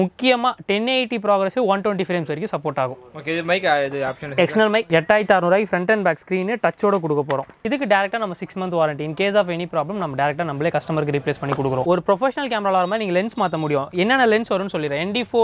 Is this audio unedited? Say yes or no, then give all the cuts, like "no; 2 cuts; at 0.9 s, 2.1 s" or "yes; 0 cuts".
no; 3 cuts; at 4.9 s, 7.5 s, 11.8 s